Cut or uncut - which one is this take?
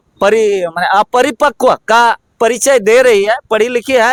uncut